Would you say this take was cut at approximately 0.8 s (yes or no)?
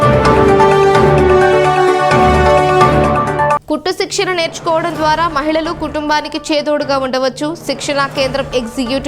yes